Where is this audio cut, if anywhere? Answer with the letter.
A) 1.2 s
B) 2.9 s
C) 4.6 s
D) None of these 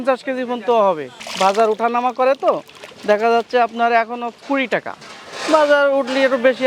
A